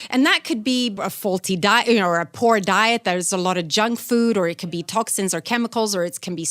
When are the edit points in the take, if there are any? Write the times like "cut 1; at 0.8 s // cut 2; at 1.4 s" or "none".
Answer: cut 1; at 0.9 s